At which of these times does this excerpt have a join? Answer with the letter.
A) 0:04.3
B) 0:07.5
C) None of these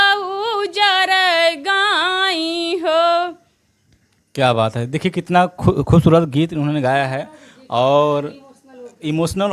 C